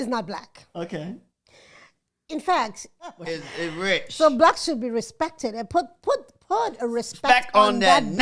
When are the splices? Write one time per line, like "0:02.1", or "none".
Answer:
0:03.2